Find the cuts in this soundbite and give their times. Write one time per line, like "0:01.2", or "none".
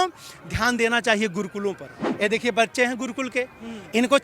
0:02.0